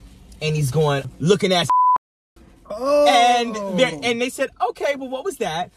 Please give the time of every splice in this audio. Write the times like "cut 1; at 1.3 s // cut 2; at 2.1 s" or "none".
cut 1; at 1.0 s